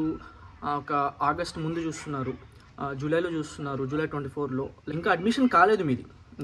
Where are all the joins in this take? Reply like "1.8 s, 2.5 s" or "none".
4.8 s